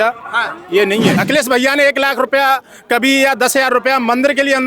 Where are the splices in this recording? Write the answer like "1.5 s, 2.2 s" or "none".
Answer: 1.2 s